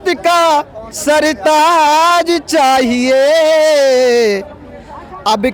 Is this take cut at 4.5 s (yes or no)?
no